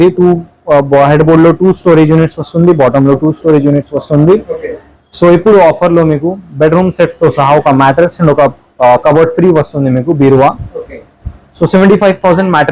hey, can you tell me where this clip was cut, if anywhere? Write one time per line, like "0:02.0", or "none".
none